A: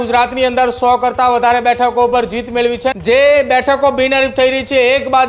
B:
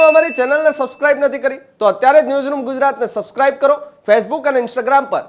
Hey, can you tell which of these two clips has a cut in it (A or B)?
A